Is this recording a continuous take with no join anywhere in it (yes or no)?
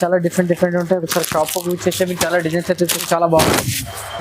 no